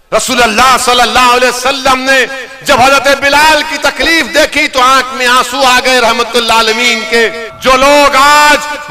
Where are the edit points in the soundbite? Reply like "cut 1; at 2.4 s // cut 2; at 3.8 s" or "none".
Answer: cut 1; at 7.5 s